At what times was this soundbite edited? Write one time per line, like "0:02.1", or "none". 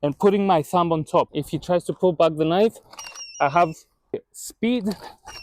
0:01.4
0:04.3